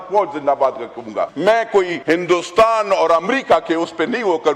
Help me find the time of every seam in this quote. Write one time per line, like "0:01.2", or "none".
0:01.3
0:02.0